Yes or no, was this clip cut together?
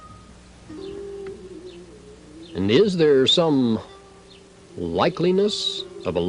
yes